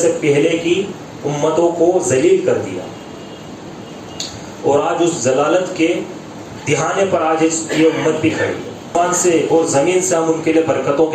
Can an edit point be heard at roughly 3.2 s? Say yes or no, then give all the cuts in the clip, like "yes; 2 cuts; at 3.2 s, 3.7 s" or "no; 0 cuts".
no; 1 cut; at 8.9 s